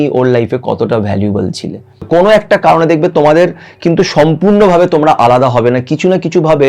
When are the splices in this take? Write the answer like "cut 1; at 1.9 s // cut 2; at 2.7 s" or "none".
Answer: cut 1; at 2.0 s